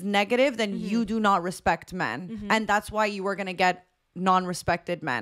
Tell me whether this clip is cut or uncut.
uncut